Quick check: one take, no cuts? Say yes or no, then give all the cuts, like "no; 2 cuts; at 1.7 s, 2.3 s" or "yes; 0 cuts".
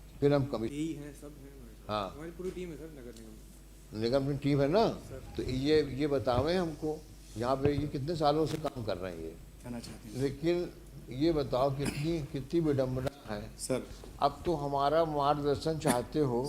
no; 2 cuts; at 0.7 s, 9.7 s